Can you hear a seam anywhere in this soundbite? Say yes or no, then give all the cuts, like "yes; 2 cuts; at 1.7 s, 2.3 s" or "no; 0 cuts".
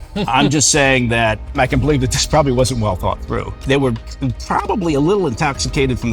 yes; 2 cuts; at 1.6 s, 3.6 s